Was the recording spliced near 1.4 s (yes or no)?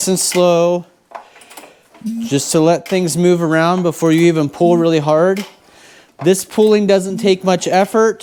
no